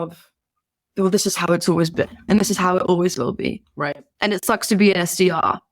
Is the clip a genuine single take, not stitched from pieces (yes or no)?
no